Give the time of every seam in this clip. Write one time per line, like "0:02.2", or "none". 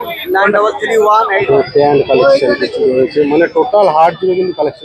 0:01.4